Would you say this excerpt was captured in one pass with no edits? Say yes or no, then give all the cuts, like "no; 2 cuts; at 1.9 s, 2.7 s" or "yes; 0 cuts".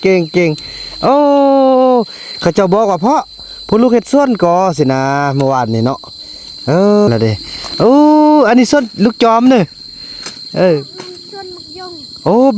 no; 1 cut; at 7.1 s